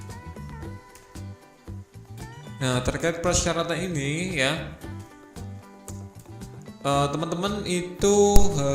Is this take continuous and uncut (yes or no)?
no